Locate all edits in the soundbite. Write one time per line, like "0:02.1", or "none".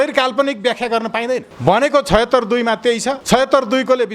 0:01.5
0:03.2